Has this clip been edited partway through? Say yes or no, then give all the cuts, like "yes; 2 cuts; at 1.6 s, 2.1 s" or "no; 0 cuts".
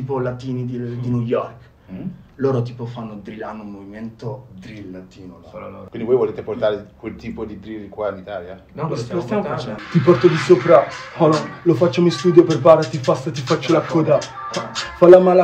yes; 2 cuts; at 5.9 s, 9.7 s